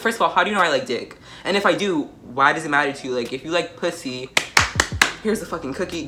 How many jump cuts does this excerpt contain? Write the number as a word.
zero